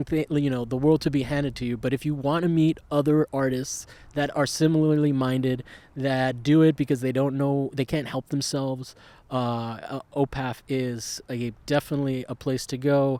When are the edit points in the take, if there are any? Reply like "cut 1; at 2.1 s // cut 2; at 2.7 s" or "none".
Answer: none